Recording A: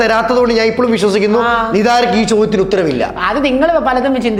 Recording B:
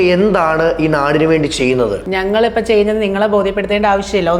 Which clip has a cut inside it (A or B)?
B